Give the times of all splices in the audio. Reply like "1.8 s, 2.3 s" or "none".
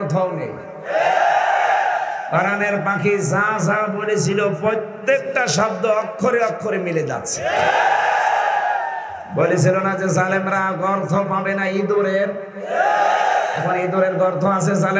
none